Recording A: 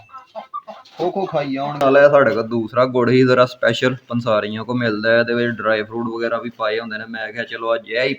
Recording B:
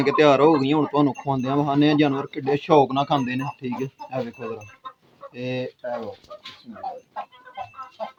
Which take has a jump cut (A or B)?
A